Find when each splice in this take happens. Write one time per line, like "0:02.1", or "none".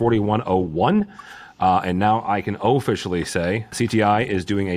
0:03.7